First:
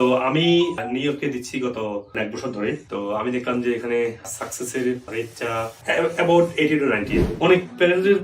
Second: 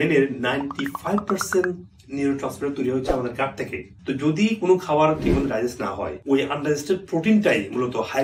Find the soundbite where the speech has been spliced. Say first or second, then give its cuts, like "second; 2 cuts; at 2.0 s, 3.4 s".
first; 4 cuts; at 0.8 s, 2.4 s, 5.8 s, 7.1 s